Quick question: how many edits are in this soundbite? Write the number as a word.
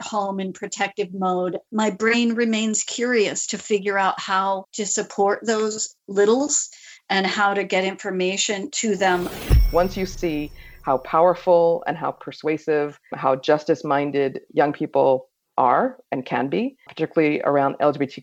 two